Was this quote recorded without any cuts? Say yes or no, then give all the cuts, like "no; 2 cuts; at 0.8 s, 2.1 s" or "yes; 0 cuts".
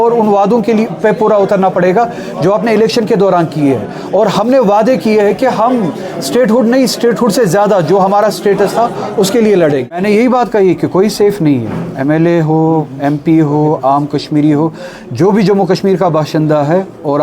no; 1 cut; at 10.0 s